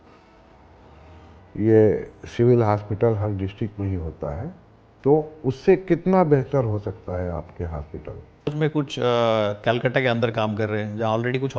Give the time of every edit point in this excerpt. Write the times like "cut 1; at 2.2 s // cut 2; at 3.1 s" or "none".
cut 1; at 8.5 s